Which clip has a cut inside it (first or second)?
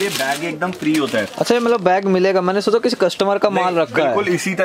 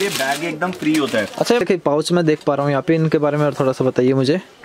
second